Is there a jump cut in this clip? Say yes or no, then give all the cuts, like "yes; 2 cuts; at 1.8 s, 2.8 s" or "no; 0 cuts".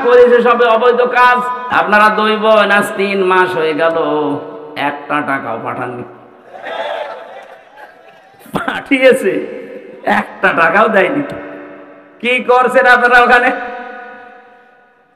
yes; 1 cut; at 1.6 s